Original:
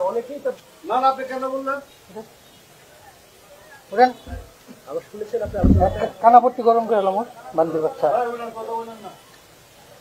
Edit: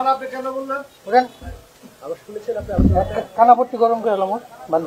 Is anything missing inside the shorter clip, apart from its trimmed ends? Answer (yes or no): yes